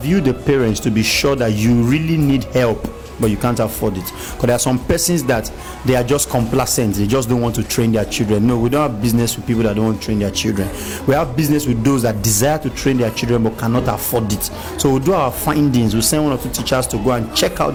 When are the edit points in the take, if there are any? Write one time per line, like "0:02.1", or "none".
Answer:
none